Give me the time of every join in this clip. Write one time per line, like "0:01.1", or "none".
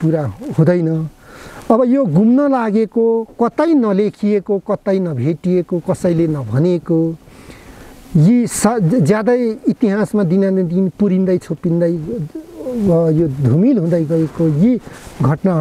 none

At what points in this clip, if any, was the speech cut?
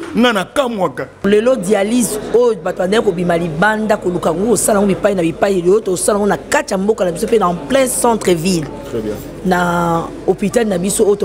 0:01.2

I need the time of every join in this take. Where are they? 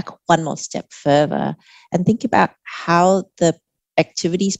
none

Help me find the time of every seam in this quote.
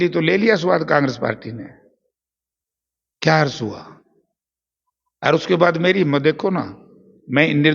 none

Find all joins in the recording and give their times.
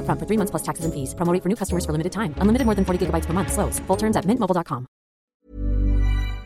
0:05.4

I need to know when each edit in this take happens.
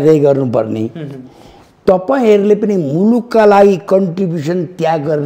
none

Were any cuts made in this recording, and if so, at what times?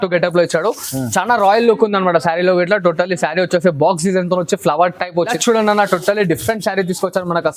0:05.3

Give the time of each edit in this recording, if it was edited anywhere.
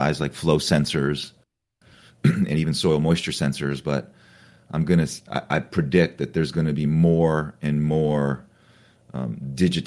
none

